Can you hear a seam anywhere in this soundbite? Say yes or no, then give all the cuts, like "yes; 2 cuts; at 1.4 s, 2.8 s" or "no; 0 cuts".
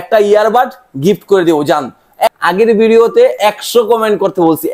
yes; 1 cut; at 2.3 s